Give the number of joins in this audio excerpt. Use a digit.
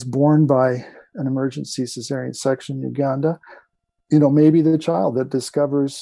0